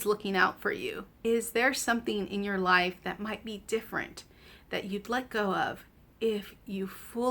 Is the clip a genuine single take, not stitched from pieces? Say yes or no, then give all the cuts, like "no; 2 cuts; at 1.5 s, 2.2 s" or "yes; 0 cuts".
no; 1 cut; at 1.1 s